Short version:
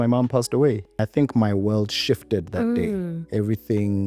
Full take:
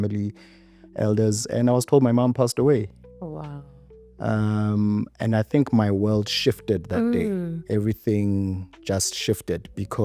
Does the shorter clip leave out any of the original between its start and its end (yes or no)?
yes